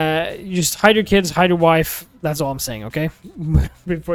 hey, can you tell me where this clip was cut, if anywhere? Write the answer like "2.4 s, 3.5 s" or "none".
none